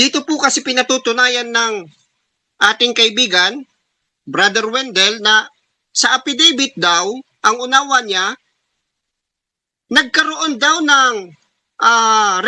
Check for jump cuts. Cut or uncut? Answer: uncut